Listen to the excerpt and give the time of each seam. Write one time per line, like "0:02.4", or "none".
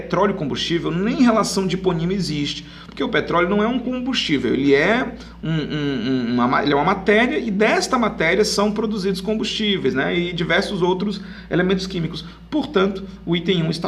none